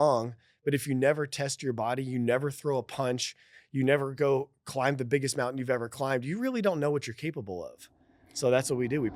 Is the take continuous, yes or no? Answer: yes